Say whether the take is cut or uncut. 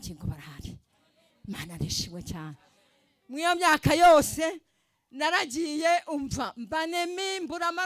uncut